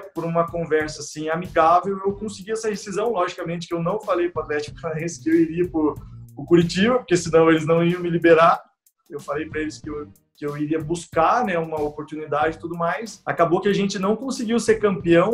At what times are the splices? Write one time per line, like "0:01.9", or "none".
0:13.1